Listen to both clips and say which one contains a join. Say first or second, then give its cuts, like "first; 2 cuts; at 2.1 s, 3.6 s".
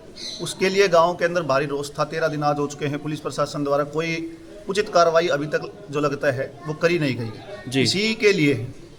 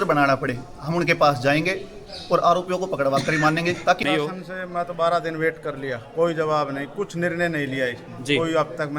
second; 1 cut; at 4.0 s